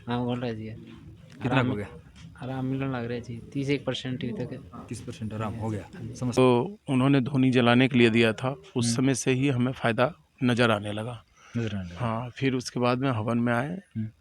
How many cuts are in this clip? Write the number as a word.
one